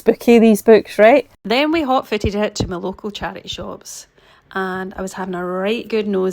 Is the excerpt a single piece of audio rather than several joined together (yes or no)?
no